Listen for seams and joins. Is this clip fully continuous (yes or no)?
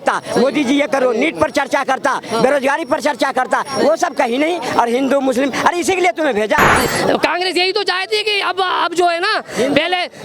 no